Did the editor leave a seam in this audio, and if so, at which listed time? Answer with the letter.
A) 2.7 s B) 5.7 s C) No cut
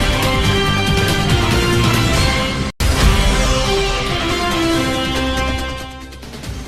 A